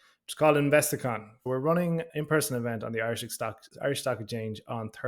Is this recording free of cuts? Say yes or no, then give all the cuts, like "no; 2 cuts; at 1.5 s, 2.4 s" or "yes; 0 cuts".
no; 1 cut; at 1.3 s